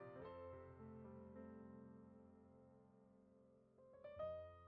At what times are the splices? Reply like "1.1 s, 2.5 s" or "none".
none